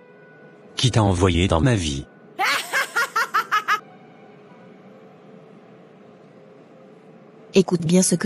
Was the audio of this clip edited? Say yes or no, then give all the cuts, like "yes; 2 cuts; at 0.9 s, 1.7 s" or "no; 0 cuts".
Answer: yes; 1 cut; at 3.8 s